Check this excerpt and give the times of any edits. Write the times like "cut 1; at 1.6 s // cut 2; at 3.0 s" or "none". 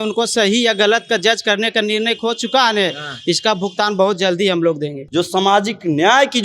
cut 1; at 5.0 s